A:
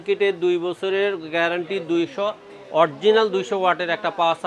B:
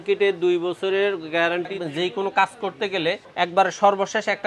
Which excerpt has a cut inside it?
B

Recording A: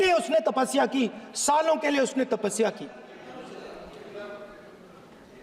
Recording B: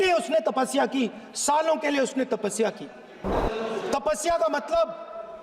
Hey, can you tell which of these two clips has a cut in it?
B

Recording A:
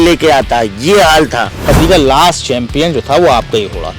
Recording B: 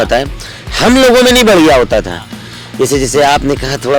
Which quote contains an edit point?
A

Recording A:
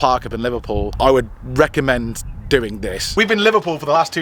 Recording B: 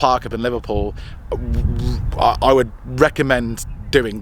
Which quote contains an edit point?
A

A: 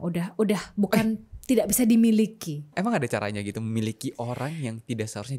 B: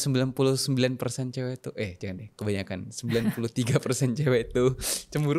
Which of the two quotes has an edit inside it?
A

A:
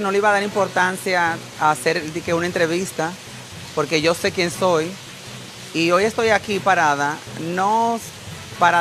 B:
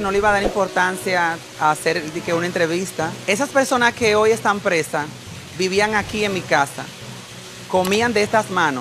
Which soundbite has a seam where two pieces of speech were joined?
B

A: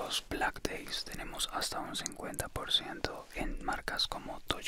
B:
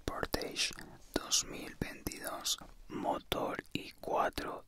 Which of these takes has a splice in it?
B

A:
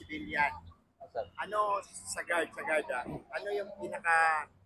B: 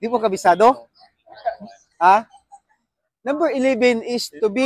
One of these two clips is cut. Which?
B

